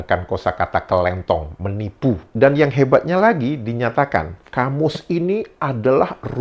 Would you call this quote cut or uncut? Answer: cut